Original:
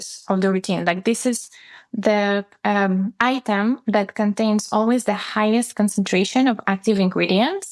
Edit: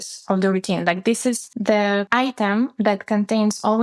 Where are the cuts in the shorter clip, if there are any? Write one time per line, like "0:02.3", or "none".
0:02.0